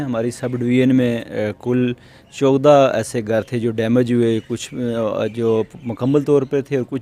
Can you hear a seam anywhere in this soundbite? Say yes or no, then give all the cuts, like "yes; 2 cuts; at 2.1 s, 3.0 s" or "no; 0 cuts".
no; 0 cuts